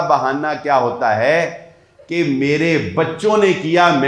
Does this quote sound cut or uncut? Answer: uncut